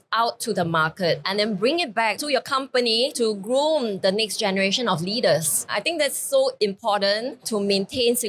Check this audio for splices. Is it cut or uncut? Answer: cut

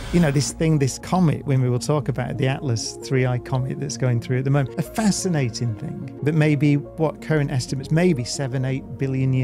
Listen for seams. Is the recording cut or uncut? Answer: uncut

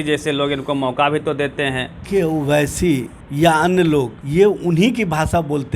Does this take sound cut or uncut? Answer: cut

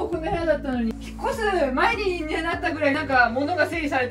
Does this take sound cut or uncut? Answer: cut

